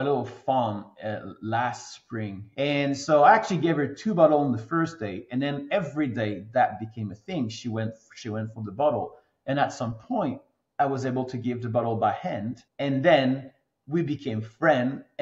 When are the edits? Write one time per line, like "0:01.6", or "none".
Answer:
0:02.4